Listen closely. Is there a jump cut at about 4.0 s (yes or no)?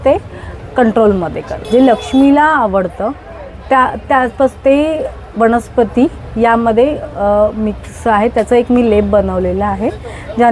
no